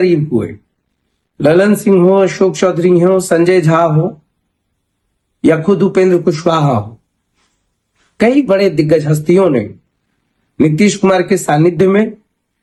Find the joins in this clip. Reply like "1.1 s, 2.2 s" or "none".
none